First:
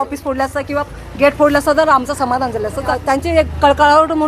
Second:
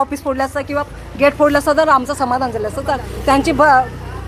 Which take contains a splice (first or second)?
first